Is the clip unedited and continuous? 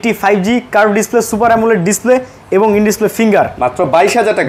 yes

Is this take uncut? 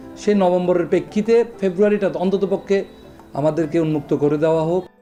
yes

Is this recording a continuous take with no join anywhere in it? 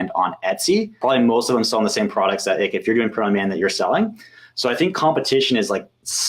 no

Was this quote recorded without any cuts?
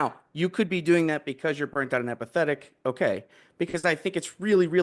yes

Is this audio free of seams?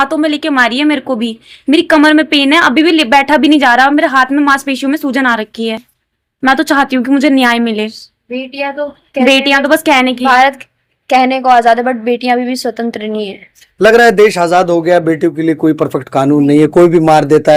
yes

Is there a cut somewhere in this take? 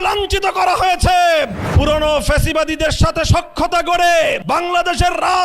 yes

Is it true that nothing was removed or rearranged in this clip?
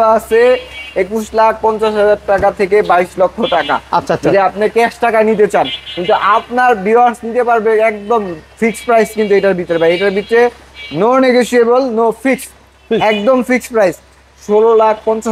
yes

